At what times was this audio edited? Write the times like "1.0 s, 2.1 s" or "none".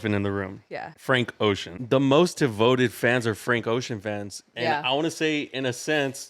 0.9 s, 1.8 s